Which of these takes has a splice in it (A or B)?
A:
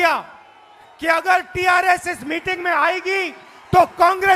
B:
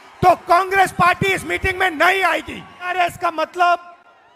B